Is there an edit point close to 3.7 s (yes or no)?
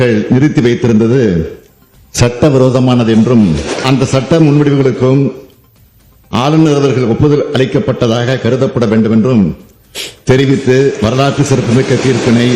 yes